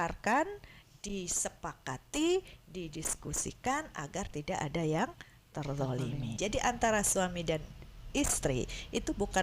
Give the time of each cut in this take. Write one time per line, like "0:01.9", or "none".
0:06.3